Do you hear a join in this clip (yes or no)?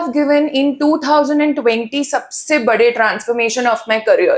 no